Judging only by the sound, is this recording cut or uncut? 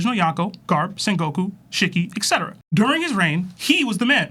uncut